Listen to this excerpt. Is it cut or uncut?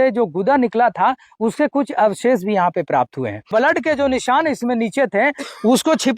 cut